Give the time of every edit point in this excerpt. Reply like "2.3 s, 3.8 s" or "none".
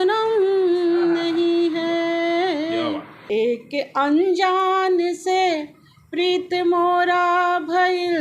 3.1 s